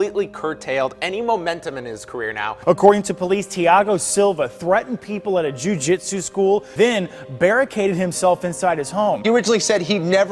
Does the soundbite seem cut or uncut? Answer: cut